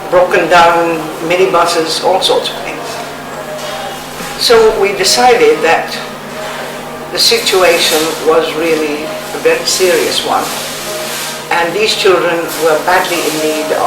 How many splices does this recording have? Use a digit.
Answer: 0